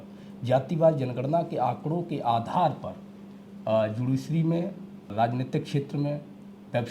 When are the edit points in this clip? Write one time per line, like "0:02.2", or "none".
0:05.1